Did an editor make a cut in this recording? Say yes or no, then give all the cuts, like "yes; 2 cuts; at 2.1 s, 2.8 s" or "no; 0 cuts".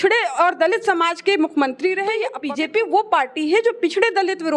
yes; 1 cut; at 2.3 s